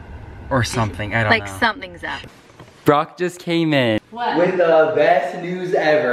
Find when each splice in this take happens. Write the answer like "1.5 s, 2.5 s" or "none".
2.2 s